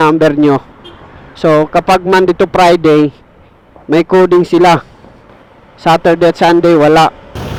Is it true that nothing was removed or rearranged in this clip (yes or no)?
yes